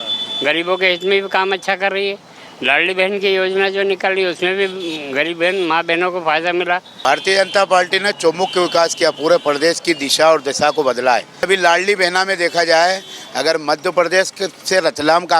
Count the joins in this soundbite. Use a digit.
2